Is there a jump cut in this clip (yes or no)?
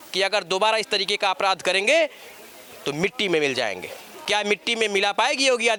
no